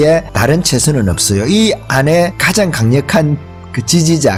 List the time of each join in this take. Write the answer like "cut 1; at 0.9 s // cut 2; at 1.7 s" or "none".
none